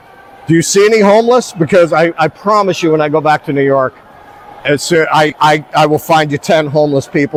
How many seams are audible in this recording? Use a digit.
0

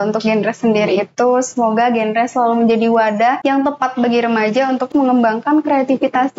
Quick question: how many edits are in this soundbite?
2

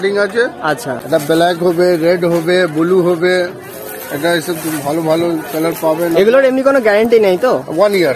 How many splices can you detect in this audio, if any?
1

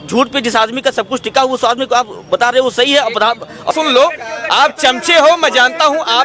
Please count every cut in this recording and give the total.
1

